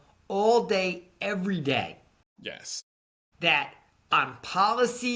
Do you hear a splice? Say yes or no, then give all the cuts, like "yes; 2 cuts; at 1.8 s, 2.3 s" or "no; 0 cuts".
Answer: no; 0 cuts